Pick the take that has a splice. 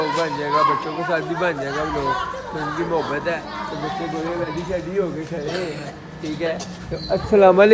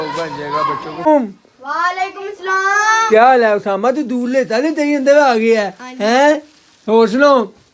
second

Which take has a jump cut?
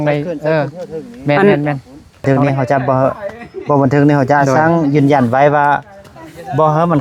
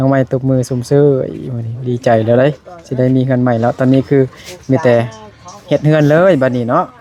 first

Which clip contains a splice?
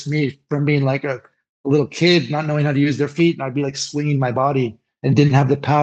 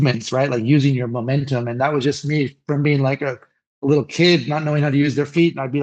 first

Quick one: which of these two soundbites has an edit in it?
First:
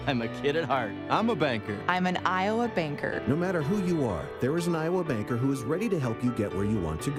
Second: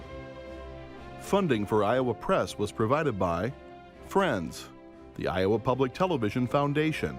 second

